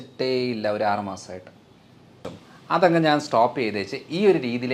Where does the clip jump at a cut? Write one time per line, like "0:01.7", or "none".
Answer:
0:02.3